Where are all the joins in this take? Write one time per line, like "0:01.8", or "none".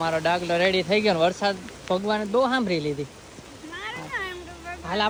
none